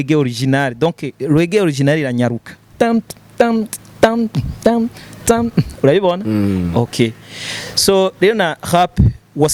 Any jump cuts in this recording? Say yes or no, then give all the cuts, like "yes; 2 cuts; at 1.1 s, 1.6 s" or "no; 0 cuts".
no; 0 cuts